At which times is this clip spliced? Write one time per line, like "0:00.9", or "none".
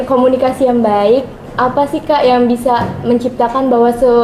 none